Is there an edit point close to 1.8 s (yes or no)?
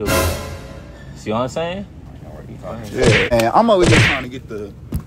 no